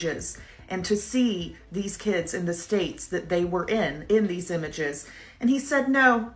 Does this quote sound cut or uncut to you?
uncut